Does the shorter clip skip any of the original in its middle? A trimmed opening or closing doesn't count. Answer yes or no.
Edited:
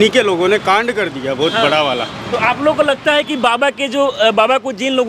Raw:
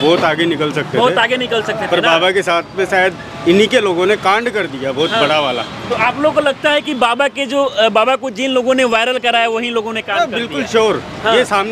no